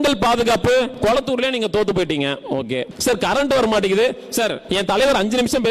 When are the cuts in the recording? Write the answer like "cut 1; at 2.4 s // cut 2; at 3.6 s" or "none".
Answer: cut 1; at 0.9 s // cut 2; at 2.9 s // cut 3; at 4.6 s